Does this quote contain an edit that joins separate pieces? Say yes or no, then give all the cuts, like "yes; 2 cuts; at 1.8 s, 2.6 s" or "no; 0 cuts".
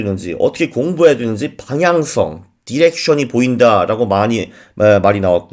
no; 0 cuts